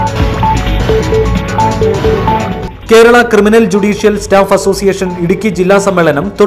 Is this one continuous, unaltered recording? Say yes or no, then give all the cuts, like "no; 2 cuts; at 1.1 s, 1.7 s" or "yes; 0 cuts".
yes; 0 cuts